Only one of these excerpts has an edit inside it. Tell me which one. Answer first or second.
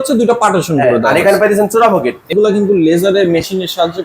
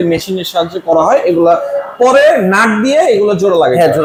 first